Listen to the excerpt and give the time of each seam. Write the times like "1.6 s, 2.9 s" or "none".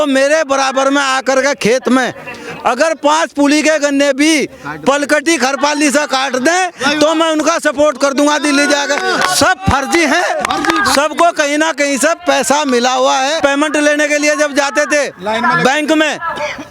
13.4 s